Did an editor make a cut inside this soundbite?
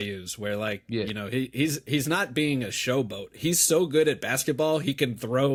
no; 0 cuts

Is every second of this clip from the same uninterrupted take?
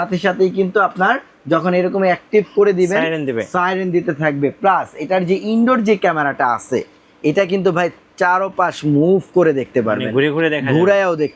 yes; 0 cuts

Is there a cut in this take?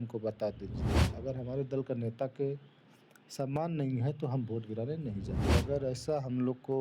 yes; 2 cuts; at 1.0 s, 5.4 s

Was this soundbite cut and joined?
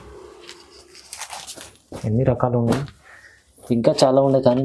no; 0 cuts

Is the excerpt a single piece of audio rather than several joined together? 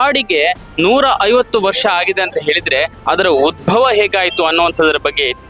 yes; 0 cuts

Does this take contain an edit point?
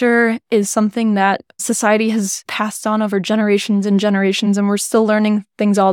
yes; 2 cuts; at 2.5 s, 4.7 s

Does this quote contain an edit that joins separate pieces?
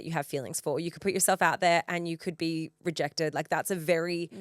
no; 0 cuts

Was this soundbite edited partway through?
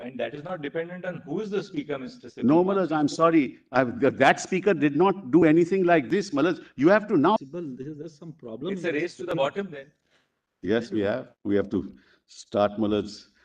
yes; 1 cut; at 7.4 s

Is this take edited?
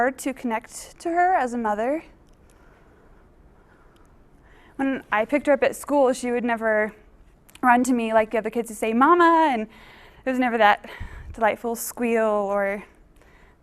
yes; 1 cut; at 4.8 s

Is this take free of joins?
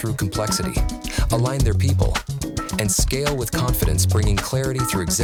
yes; 0 cuts

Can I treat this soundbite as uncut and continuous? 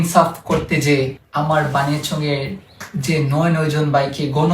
no; 1 cut; at 1.2 s

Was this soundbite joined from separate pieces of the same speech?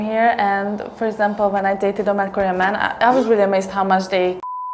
no; 0 cuts

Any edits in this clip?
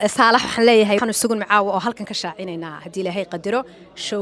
yes; 1 cut; at 1.0 s

